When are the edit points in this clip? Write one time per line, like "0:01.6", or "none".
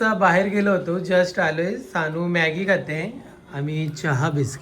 none